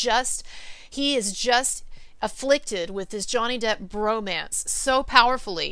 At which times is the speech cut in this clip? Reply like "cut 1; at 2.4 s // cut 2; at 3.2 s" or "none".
none